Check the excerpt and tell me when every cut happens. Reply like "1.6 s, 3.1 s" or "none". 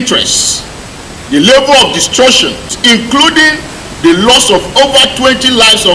2.7 s